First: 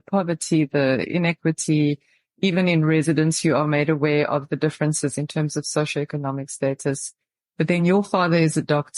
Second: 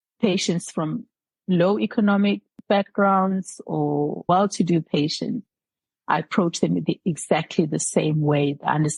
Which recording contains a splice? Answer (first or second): second